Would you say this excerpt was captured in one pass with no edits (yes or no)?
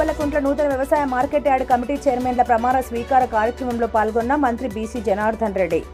yes